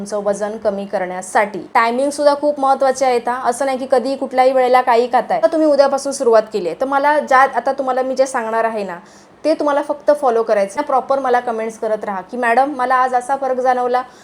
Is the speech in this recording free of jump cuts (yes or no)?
no